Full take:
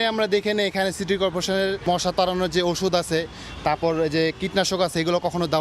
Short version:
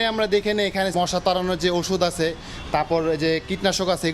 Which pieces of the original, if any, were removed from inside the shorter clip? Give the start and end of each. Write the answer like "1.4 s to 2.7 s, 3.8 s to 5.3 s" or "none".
0.9 s to 1.8 s